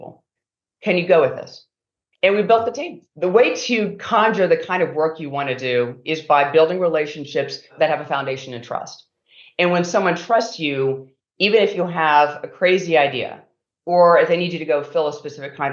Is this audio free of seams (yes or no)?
no